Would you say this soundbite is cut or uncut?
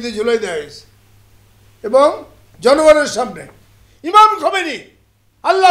uncut